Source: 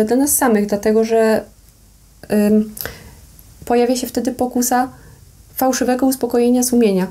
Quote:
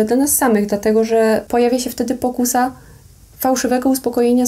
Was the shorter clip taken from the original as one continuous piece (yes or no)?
no